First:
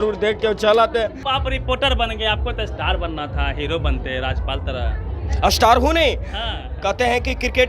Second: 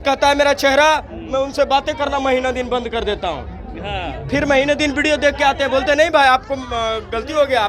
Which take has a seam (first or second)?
first